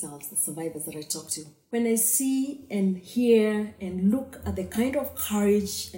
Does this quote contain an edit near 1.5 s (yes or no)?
yes